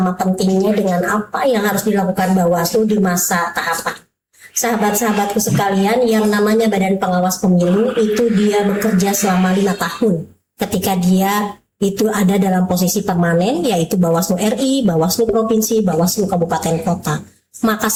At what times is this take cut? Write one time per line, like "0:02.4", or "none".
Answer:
none